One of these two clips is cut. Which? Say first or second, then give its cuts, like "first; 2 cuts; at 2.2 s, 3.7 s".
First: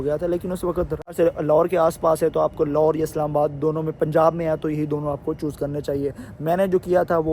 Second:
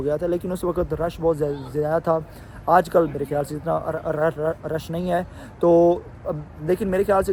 first; 1 cut; at 1.2 s